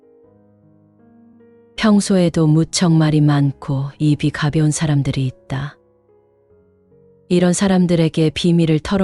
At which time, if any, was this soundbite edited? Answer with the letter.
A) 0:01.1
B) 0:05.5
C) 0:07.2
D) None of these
A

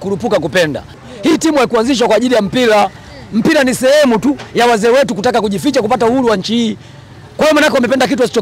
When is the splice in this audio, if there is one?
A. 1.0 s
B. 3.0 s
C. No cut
A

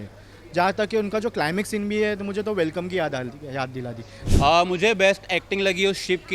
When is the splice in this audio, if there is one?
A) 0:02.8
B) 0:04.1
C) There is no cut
B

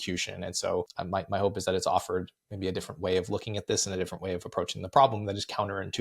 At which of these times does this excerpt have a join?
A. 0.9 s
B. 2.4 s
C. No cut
A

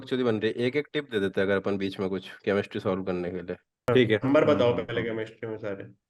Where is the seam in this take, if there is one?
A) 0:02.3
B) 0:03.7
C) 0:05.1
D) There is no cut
D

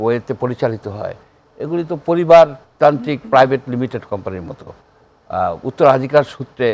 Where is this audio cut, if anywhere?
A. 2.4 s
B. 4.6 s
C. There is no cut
C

